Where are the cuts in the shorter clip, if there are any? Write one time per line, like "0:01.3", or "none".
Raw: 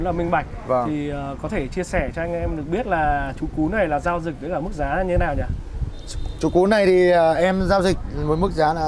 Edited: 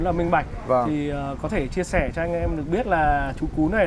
none